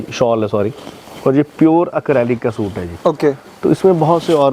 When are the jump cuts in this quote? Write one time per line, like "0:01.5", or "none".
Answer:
none